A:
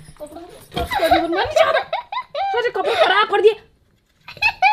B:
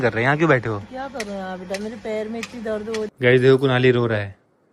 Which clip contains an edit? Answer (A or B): B